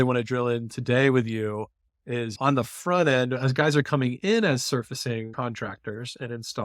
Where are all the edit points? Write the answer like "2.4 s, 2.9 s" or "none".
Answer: 2.4 s, 5.3 s

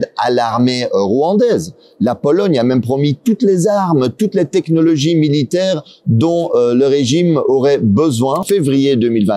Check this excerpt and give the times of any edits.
8.4 s

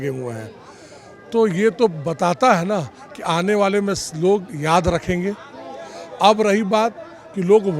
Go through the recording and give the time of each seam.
none

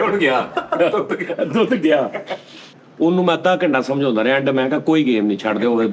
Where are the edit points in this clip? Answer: 2.6 s

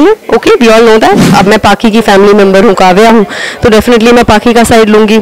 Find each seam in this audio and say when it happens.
1.2 s

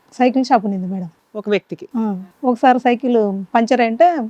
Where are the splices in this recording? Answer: 2.0 s

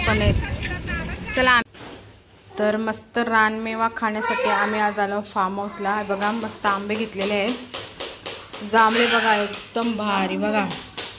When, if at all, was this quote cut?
1.6 s

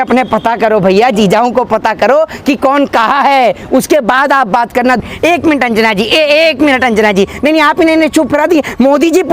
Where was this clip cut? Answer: 5.0 s

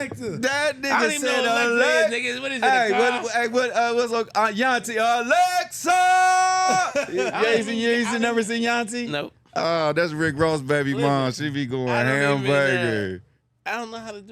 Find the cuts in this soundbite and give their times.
none

